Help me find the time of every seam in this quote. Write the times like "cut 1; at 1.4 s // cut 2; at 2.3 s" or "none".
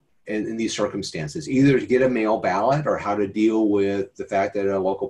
none